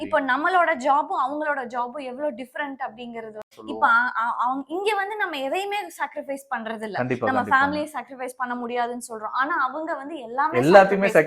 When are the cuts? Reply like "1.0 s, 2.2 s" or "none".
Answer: 3.5 s

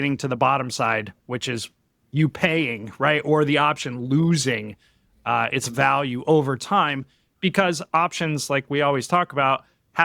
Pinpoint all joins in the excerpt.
none

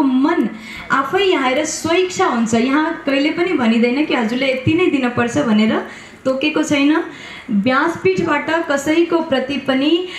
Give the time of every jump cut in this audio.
none

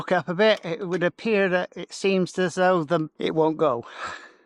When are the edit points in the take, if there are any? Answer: 3.1 s

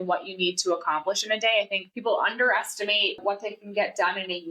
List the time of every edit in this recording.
1.8 s, 3.2 s

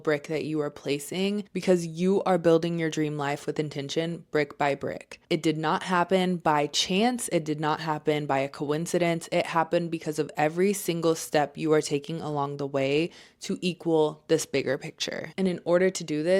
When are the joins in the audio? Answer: 1.5 s

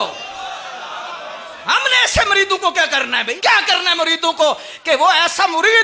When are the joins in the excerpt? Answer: 1.6 s, 3.3 s

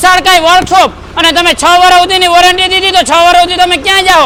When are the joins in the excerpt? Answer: none

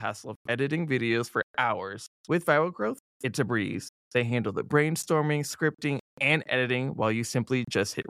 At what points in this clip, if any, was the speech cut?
none

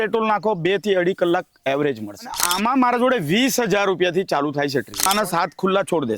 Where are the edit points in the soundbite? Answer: 2.5 s, 5.1 s

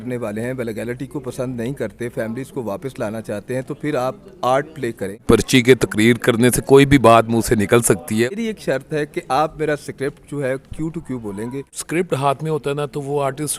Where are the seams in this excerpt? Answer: 5.2 s, 8.3 s, 12.0 s

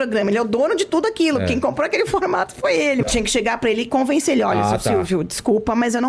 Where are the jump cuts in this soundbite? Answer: 3.0 s

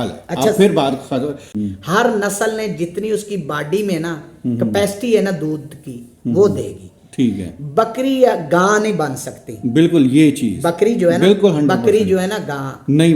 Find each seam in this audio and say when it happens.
1.6 s

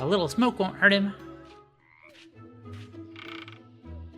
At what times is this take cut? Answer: 1.2 s

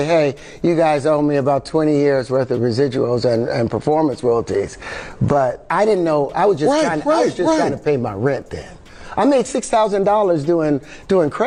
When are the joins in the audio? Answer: none

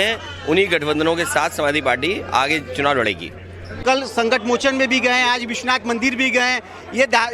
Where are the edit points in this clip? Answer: 3.8 s

